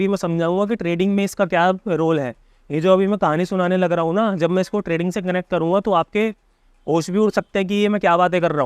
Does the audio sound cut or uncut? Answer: uncut